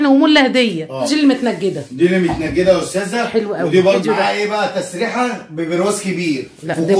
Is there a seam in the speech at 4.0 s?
yes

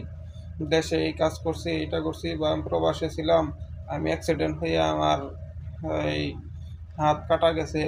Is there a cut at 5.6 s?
no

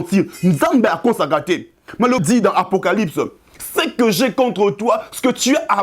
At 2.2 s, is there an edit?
yes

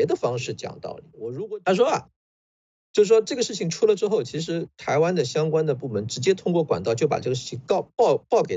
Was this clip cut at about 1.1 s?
yes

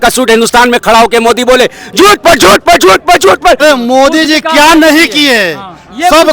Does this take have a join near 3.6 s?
yes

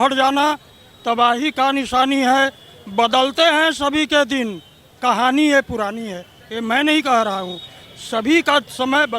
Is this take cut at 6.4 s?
no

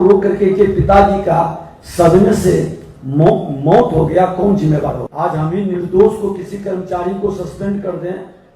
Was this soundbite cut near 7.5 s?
no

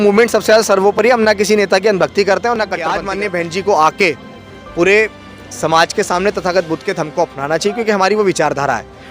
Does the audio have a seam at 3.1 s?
yes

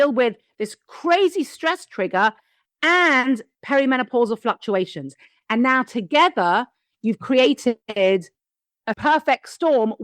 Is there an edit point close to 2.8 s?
no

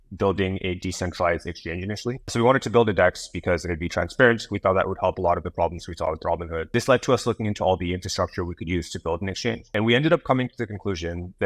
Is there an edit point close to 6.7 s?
yes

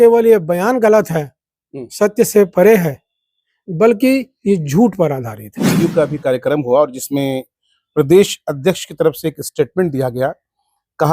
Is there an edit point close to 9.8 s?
no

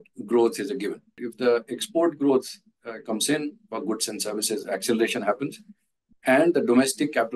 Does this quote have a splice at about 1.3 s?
yes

